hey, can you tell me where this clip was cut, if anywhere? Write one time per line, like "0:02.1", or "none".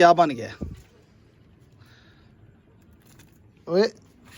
none